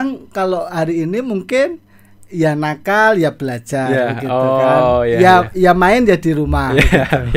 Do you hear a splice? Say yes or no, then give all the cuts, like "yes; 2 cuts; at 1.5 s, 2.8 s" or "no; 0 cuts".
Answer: no; 0 cuts